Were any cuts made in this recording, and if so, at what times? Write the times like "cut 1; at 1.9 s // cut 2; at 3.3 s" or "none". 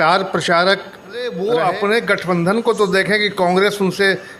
cut 1; at 1.3 s